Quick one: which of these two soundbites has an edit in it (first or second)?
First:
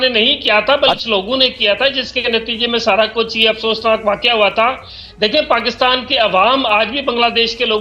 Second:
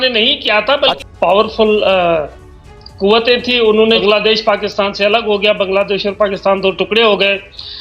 second